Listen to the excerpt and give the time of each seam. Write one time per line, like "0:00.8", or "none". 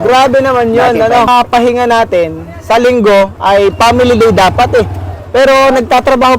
0:01.3